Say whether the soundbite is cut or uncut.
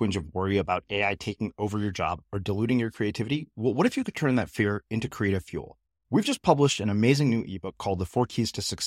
uncut